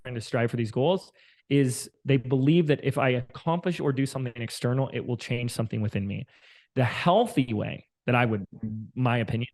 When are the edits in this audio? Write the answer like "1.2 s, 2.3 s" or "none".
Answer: 1.9 s